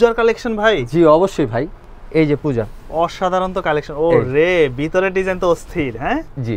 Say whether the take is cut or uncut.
uncut